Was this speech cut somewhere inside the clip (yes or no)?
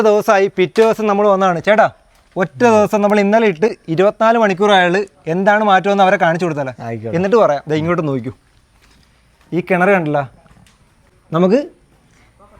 no